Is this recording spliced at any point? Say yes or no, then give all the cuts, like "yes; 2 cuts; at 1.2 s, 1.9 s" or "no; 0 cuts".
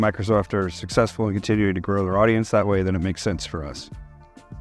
no; 0 cuts